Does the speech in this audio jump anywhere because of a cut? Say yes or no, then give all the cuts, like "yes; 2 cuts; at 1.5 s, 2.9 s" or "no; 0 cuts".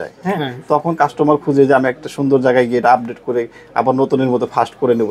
no; 0 cuts